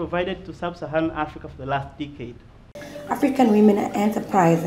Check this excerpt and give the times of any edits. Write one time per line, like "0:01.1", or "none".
0:02.6